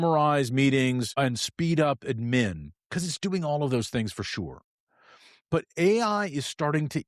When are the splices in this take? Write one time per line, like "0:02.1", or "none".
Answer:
0:01.1